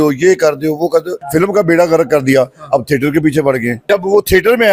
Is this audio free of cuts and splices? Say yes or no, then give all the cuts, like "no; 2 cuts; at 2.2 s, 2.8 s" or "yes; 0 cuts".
no; 2 cuts; at 1.2 s, 3.8 s